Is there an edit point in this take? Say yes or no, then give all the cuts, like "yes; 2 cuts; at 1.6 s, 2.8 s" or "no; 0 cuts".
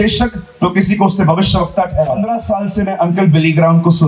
yes; 1 cut; at 2.2 s